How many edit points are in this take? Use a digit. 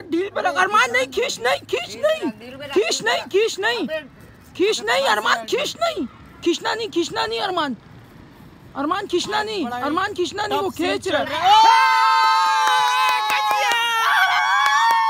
0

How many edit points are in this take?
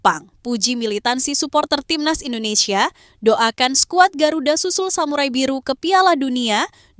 0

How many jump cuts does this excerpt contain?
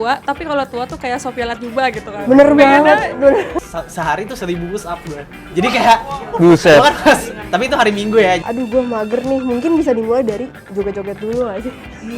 2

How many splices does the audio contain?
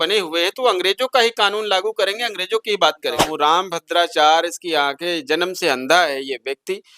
1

